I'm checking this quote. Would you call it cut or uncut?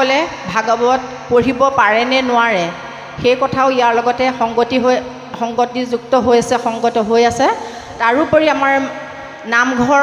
uncut